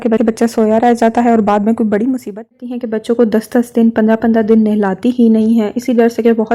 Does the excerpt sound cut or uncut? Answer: cut